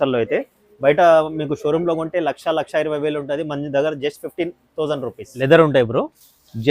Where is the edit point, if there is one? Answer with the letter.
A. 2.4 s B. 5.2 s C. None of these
B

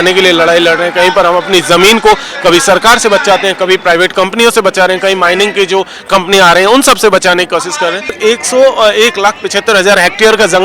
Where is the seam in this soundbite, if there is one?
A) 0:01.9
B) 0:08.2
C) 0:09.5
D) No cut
B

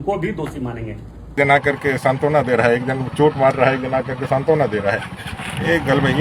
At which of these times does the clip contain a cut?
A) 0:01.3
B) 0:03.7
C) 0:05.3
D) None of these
A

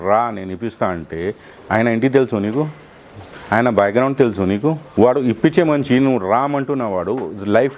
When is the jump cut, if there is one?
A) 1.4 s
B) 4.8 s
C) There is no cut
B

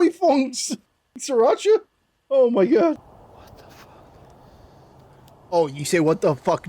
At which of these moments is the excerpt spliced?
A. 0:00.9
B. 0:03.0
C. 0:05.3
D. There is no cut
B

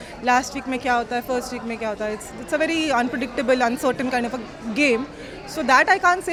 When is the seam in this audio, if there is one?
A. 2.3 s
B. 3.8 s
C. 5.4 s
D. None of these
D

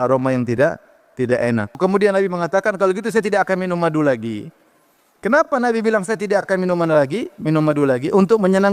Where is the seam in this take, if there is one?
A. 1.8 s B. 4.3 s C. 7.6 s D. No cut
A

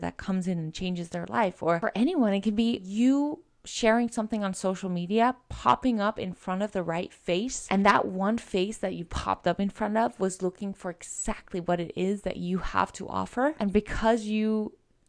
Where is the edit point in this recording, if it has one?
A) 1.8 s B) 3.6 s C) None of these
A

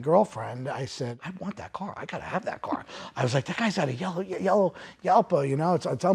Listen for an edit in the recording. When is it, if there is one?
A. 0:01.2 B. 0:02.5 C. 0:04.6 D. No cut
A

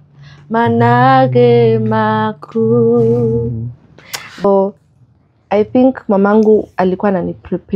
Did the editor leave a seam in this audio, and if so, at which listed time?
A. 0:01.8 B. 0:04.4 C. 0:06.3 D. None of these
B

